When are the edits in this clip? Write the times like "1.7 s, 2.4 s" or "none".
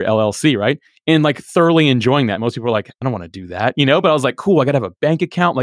none